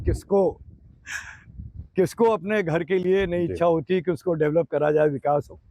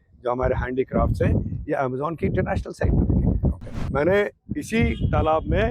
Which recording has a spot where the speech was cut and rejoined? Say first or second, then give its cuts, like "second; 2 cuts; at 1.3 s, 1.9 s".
second; 1 cut; at 3.8 s